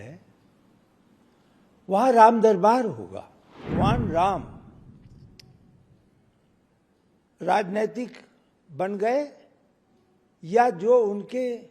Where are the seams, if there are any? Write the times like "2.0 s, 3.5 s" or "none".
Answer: 3.7 s